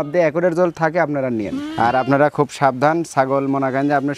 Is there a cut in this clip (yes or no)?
yes